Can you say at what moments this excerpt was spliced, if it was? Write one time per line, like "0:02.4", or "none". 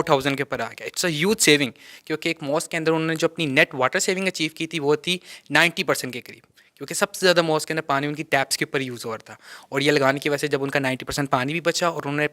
none